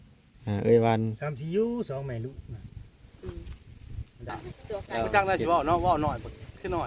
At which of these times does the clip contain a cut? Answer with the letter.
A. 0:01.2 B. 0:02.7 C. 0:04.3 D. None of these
C